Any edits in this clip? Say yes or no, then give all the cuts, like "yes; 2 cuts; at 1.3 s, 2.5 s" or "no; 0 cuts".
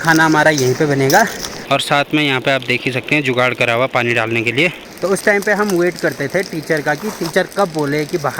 yes; 2 cuts; at 1.5 s, 4.8 s